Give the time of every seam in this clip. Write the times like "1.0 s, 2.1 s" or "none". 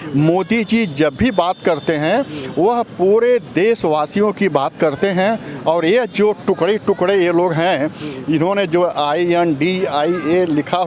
none

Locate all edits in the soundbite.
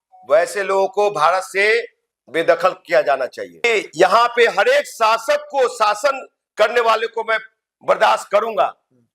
3.7 s

